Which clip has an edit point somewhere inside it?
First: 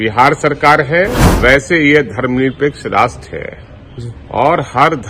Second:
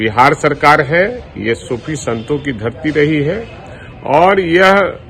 first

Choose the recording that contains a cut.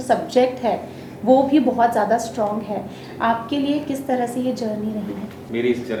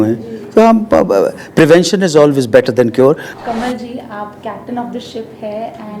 second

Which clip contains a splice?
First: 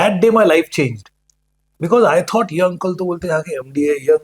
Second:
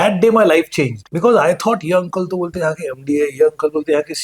second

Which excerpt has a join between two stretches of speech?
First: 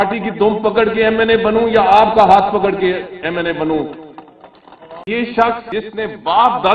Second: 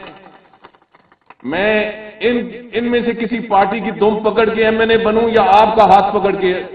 first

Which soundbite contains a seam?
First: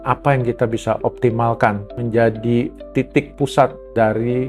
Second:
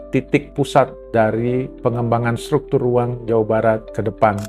first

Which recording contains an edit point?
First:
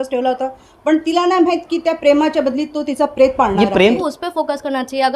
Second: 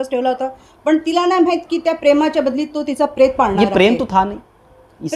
first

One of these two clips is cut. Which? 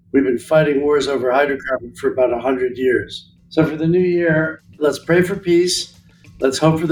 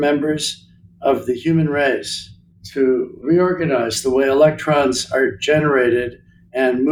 second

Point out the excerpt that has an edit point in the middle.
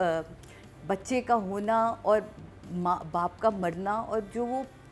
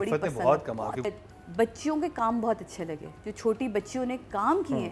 second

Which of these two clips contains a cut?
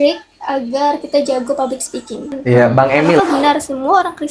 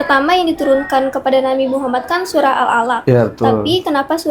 first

